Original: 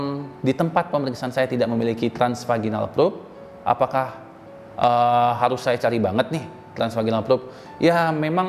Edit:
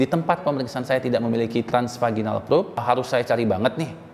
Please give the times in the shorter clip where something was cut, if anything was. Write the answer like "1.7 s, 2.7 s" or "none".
2.8 s